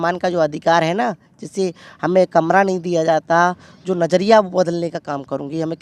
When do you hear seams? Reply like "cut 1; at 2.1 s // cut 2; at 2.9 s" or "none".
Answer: none